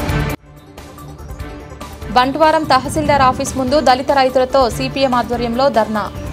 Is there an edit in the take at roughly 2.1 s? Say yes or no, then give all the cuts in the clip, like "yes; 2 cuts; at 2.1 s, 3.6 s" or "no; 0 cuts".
yes; 1 cut; at 2.1 s